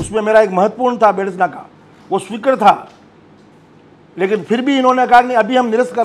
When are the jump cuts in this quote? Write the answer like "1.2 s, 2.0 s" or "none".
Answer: none